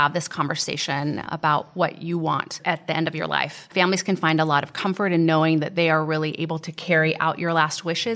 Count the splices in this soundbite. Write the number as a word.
two